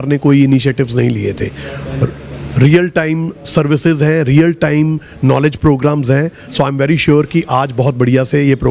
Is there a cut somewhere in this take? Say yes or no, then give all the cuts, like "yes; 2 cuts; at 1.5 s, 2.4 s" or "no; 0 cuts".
no; 0 cuts